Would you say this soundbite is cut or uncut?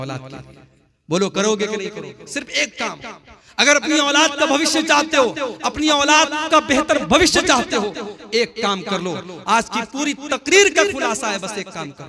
uncut